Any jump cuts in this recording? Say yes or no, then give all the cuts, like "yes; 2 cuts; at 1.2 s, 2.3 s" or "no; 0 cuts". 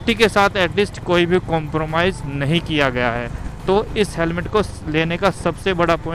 no; 0 cuts